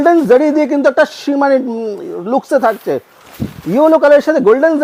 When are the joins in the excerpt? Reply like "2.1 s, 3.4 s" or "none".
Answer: none